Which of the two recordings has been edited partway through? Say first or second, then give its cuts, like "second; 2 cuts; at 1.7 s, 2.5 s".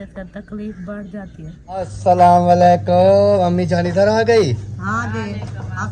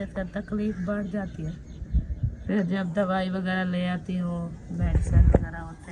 first; 1 cut; at 1.9 s